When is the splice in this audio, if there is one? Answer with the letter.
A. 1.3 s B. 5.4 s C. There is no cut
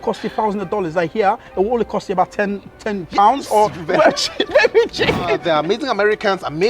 B